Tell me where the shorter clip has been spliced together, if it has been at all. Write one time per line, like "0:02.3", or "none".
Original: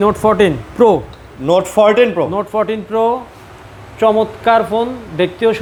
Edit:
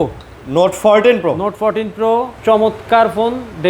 0:02.3